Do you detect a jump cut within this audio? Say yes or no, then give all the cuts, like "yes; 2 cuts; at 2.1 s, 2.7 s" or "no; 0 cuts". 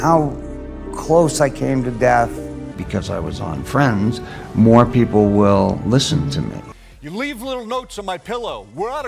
yes; 2 cuts; at 2.7 s, 6.6 s